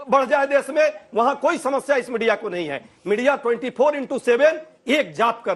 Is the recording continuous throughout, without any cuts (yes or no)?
yes